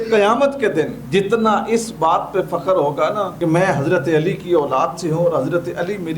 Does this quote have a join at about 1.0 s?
yes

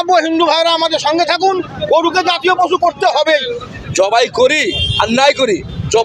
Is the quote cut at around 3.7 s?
yes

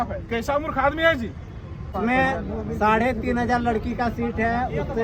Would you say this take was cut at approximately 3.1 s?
no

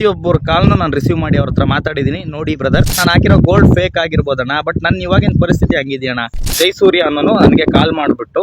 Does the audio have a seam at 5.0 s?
no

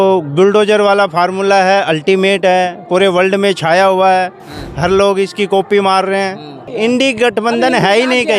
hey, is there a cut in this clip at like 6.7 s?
yes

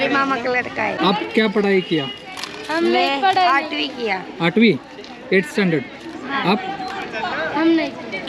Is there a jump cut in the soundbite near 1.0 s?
yes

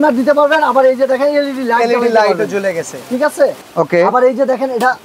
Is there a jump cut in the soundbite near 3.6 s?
yes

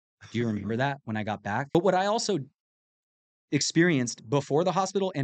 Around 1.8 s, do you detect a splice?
yes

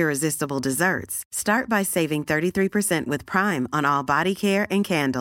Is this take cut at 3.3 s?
no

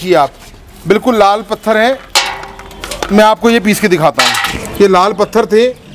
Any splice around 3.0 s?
no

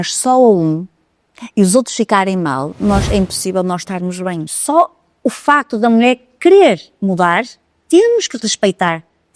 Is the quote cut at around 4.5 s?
yes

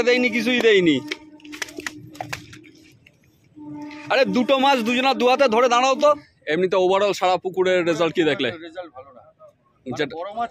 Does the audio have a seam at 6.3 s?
yes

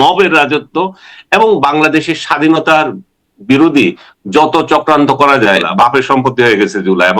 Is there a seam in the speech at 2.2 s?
no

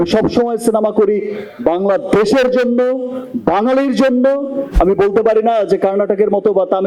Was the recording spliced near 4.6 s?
yes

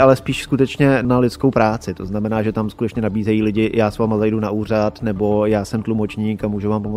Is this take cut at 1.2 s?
no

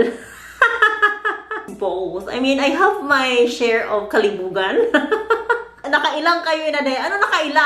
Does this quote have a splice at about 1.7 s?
yes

